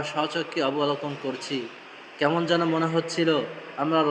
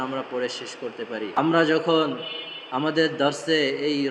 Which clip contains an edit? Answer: second; 1 cut; at 1.3 s

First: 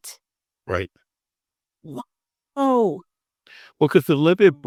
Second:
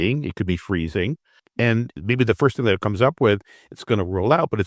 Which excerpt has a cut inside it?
second; 1 cut; at 1.7 s

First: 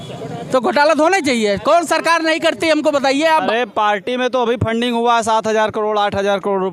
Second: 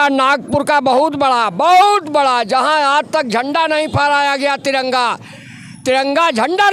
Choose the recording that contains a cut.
first; 1 cut; at 3.5 s

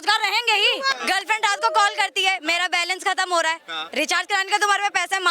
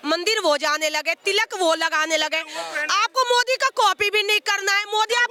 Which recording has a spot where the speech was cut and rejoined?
first; 1 cut; at 0.9 s

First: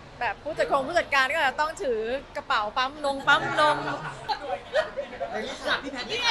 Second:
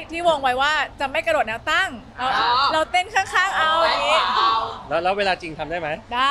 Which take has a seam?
first; 1 cut; at 4.2 s

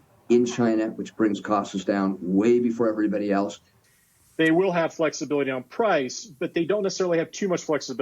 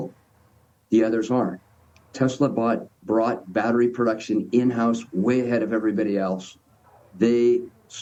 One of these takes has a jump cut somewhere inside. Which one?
first; 1 cut; at 3.7 s

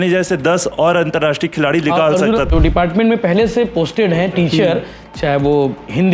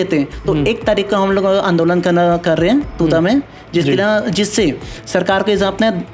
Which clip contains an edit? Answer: first; 1 cut; at 2.5 s

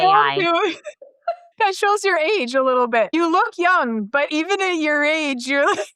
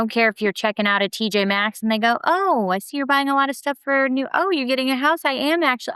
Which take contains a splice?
first; 3 cuts; at 1.4 s, 3.1 s, 4.3 s

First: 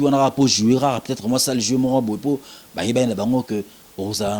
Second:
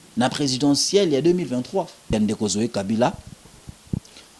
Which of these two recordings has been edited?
second; 1 cut; at 2.1 s

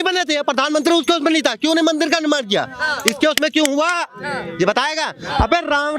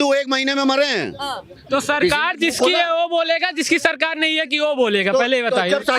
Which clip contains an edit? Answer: second; 1 cut; at 1.6 s

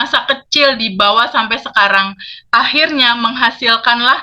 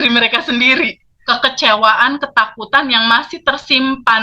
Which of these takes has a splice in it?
second; 1 cut; at 1.1 s

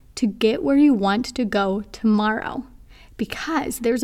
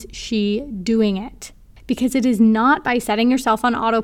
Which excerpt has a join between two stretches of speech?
second; 1 cut; at 3.1 s

